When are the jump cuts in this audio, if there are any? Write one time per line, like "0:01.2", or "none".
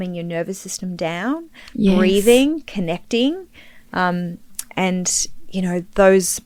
none